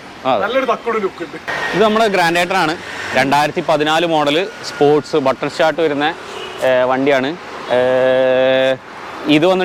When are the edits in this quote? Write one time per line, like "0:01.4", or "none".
none